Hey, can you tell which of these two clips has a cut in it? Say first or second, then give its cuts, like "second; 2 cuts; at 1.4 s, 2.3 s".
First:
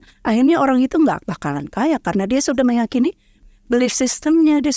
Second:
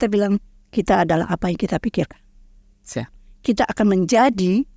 first; 1 cut; at 3.3 s